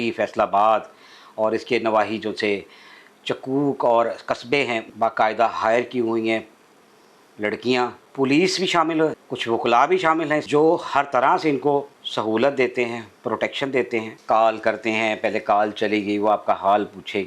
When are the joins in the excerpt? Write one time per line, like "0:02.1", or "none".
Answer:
0:04.9
0:08.0
0:14.1